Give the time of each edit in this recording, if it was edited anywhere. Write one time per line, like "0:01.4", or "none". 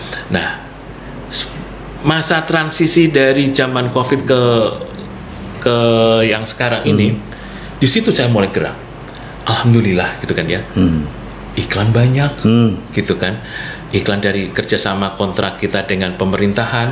none

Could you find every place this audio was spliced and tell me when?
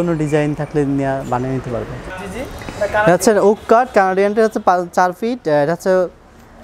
0:02.0

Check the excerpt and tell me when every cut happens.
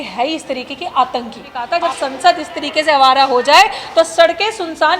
0:01.5

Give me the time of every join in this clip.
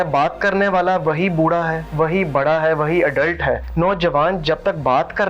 0:01.8
0:03.7

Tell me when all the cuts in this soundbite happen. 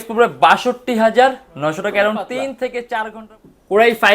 0:03.2

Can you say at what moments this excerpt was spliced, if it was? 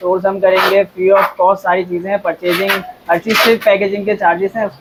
none

